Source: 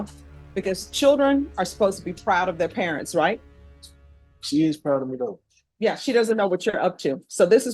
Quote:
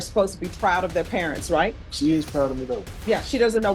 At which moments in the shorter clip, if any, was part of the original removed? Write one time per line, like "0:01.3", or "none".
0:01.9
0:02.9